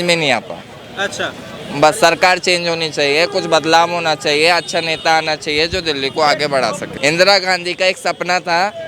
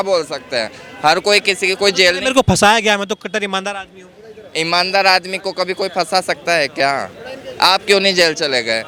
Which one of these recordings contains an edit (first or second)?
first